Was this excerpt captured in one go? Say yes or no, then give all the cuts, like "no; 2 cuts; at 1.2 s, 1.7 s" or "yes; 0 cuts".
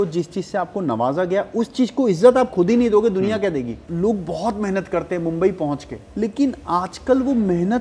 no; 2 cuts; at 3.8 s, 6.0 s